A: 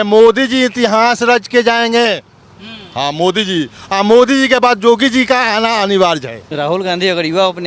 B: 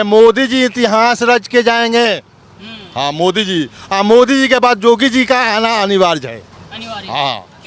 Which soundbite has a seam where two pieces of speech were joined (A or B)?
A